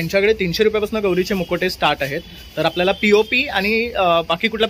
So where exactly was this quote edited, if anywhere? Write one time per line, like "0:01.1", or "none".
none